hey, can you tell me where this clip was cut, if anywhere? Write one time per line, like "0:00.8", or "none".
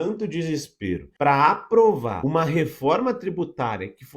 0:01.1
0:02.1